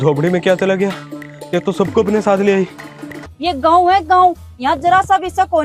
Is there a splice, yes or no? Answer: yes